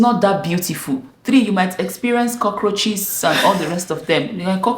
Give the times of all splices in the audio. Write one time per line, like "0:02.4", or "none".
none